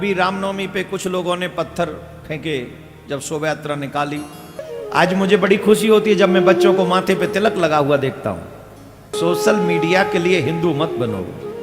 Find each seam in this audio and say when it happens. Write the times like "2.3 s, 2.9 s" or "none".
4.7 s, 9.1 s

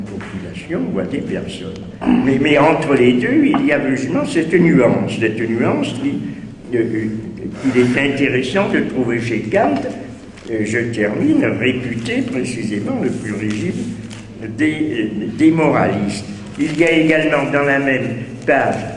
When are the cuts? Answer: none

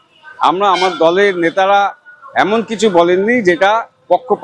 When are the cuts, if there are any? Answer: none

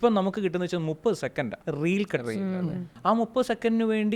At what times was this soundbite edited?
1.6 s, 2.9 s

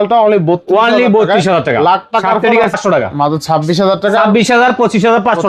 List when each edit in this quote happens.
2.7 s

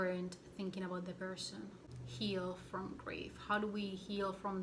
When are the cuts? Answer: 1.9 s

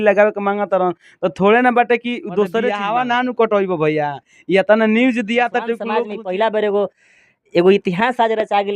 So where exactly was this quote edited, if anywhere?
2.7 s, 6.1 s

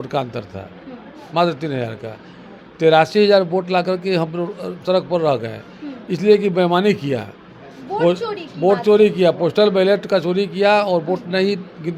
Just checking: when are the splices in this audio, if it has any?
none

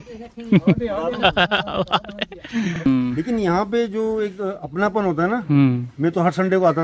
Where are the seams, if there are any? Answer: 2.9 s

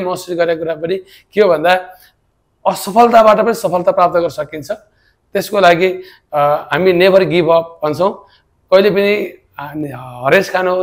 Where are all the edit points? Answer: none

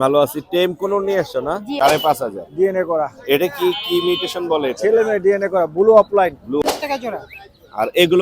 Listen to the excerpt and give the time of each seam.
1.7 s, 6.6 s

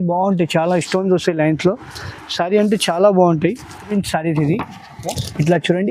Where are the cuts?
3.9 s

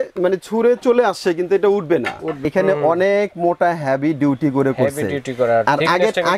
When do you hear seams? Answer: 2.4 s

